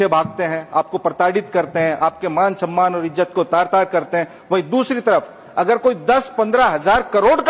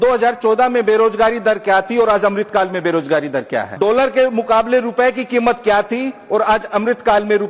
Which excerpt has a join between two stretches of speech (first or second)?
second